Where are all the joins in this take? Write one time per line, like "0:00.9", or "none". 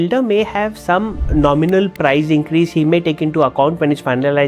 0:01.2